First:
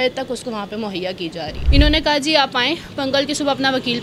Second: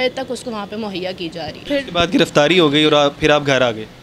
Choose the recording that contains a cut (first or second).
first